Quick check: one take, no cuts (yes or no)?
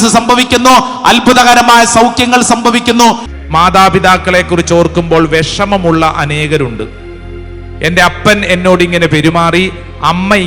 no